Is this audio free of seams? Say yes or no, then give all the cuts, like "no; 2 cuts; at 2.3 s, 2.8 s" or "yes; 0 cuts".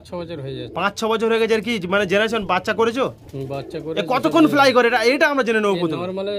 yes; 0 cuts